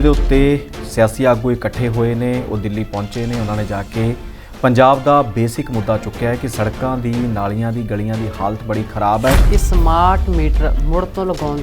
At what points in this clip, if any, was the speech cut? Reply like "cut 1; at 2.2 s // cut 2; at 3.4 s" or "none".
cut 1; at 9.4 s